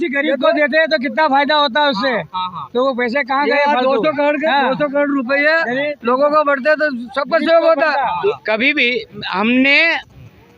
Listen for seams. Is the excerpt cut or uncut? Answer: cut